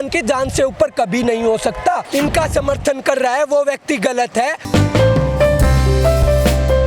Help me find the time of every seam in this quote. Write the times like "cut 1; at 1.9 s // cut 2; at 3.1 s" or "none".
cut 1; at 2.1 s // cut 2; at 4.6 s

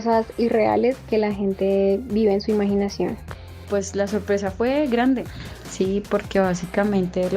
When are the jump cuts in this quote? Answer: cut 1; at 3.6 s

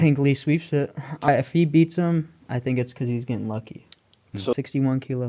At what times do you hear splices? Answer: cut 1; at 1.3 s // cut 2; at 4.5 s

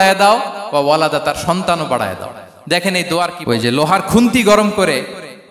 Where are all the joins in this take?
cut 1; at 3.3 s

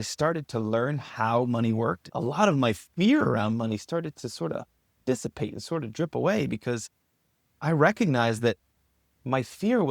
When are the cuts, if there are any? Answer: cut 1; at 2.1 s

